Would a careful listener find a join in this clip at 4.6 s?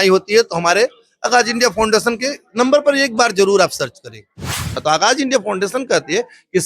yes; 1 cut; at 4.6 s

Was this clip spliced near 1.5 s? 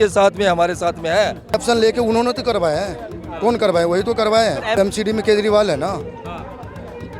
yes; 2 cuts; at 1.5 s, 4.8 s

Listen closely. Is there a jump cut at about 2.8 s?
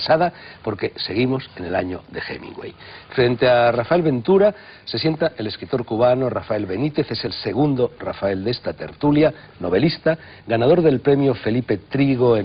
no; 1 cut; at 5.4 s

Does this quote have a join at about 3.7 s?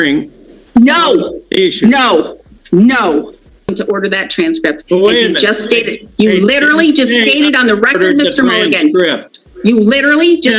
yes; 1 cut; at 3.7 s

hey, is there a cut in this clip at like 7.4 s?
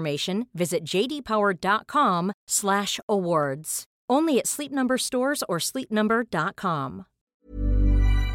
yes; 1 cut; at 7.4 s

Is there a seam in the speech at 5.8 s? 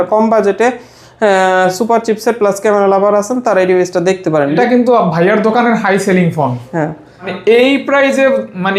no; 2 cuts; at 4.6 s, 7.3 s

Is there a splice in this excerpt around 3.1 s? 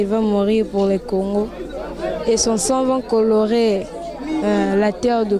no; 0 cuts

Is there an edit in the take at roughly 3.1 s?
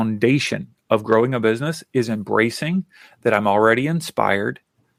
no; 0 cuts

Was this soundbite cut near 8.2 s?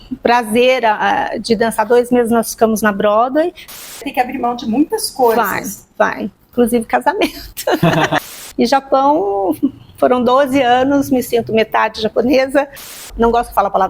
yes; 3 cuts; at 3.6 s, 8.2 s, 13.0 s

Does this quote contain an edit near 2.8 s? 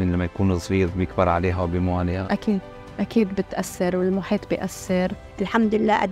no; 1 cut; at 5.2 s

